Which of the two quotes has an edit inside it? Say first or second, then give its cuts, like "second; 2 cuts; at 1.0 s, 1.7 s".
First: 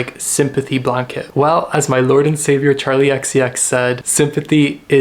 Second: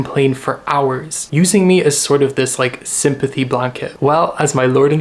first; 1 cut; at 4.0 s